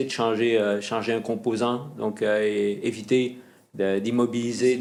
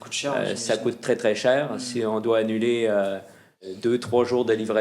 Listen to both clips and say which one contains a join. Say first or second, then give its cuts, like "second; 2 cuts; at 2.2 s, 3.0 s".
second; 1 cut; at 3.6 s